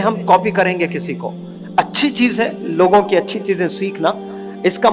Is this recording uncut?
yes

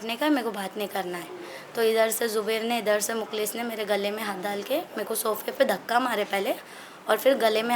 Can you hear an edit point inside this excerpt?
no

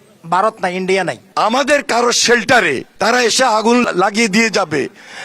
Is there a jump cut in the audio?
yes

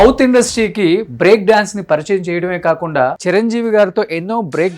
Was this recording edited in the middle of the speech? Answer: yes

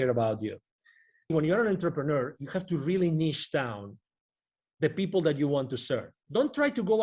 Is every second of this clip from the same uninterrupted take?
no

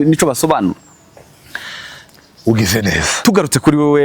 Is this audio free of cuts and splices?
no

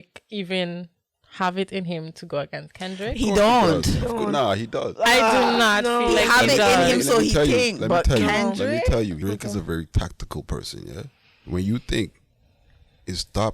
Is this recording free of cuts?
no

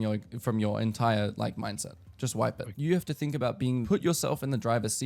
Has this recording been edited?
yes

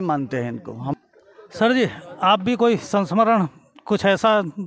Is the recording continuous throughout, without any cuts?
yes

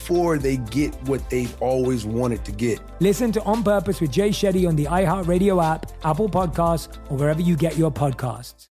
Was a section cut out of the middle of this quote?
yes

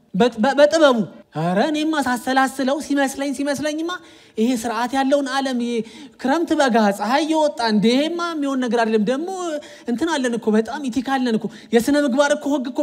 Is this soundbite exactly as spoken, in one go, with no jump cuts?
no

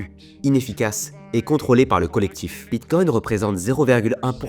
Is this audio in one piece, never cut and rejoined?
no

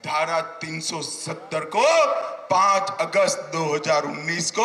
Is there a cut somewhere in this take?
no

